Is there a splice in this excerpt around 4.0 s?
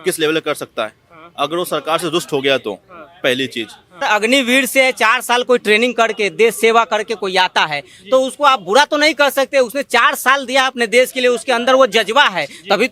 yes; 1 cut; at 4.0 s

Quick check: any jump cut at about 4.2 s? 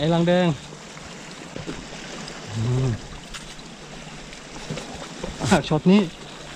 no; 2 cuts; at 1.5 s, 5.5 s

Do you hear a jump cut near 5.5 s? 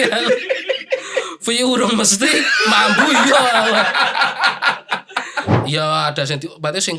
yes; 1 cut; at 5.5 s

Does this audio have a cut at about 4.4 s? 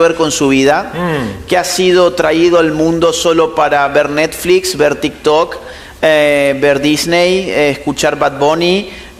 no; 0 cuts

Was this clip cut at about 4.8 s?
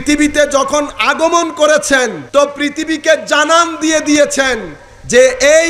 no; 1 cut; at 2.2 s

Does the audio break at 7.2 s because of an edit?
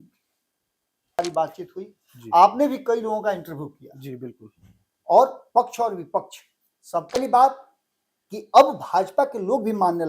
yes; 2 cuts; at 1.2 s, 7.2 s

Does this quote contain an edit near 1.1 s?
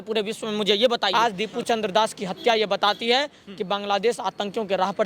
yes; 1 cut; at 1.1 s

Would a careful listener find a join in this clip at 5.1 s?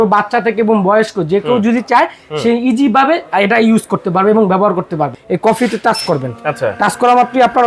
yes; 1 cut; at 5.1 s

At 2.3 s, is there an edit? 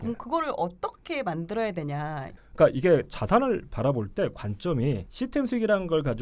yes; 2 cuts; at 2.3 s, 5.1 s

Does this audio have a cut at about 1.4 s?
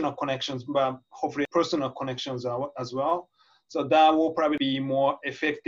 yes; 2 cuts; at 1.4 s, 4.6 s

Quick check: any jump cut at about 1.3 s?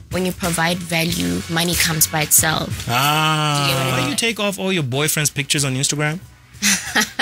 no; 1 cut; at 4.0 s

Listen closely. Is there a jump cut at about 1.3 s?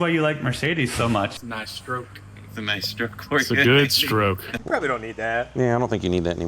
yes; 2 cuts; at 1.3 s, 4.5 s

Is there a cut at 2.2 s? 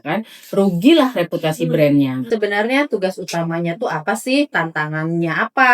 yes; 1 cut; at 2.2 s

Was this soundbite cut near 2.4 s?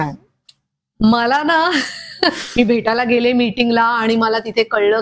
yes; 1 cut; at 2.4 s

